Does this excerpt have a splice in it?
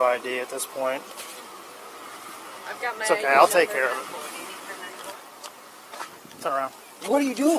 yes; 1 cut; at 1.1 s

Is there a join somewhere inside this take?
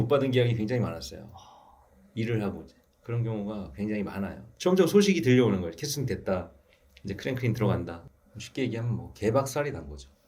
yes; 2 cuts; at 4.5 s, 8.0 s

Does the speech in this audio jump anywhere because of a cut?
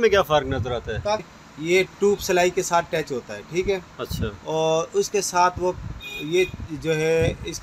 yes; 1 cut; at 1.3 s

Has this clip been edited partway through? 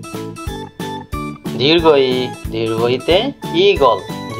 no; 0 cuts

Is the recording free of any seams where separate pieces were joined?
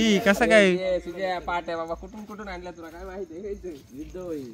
yes; 0 cuts

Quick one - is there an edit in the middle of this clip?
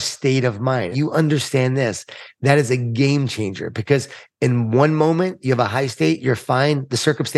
yes; 1 cut; at 0.9 s

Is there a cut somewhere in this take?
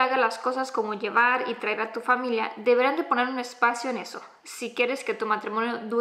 no; 0 cuts

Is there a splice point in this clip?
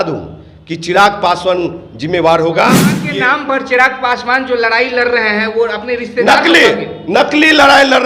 yes; 1 cut; at 3.0 s

